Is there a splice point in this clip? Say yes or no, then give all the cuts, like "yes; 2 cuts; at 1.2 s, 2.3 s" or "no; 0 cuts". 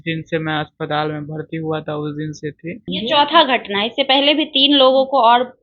yes; 1 cut; at 2.9 s